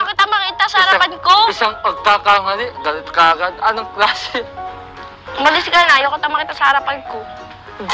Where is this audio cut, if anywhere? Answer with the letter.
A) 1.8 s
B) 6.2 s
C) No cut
C